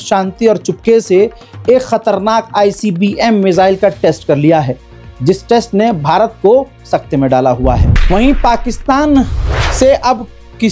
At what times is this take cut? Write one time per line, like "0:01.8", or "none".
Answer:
0:07.9